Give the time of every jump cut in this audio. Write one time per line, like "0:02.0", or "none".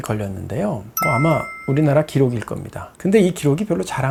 none